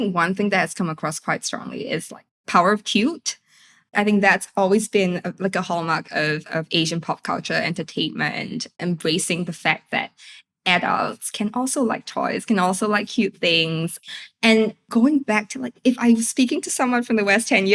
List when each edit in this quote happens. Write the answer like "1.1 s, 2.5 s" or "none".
2.3 s, 3.9 s, 8.8 s